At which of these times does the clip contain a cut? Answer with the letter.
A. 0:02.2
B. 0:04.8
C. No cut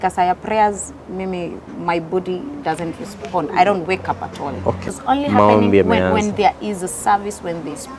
B